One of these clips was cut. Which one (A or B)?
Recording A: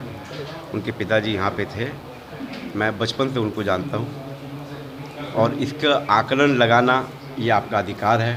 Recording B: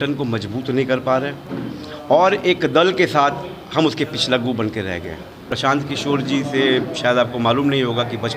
B